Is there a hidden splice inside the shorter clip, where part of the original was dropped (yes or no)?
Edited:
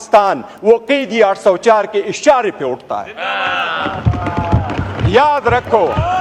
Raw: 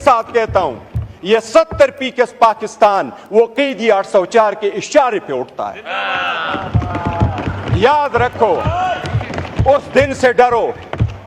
no